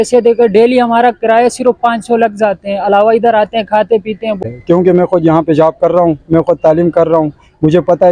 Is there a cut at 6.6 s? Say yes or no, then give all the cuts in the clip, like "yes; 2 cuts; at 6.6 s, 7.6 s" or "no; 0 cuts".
no; 1 cut; at 4.4 s